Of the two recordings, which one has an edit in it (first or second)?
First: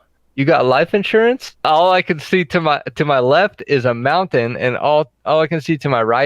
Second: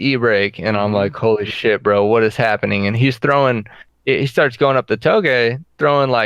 first